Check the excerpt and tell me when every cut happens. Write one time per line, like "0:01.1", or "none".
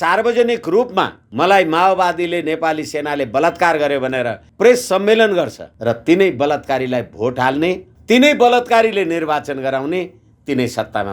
0:01.2
0:04.4
0:05.6
0:07.9